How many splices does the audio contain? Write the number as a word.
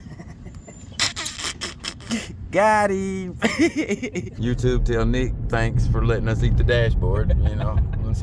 one